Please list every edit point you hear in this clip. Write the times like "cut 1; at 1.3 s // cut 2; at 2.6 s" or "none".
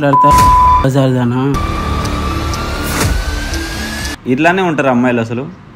cut 1; at 1.7 s // cut 2; at 4.1 s